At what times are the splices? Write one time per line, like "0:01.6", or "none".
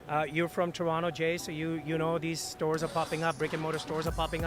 none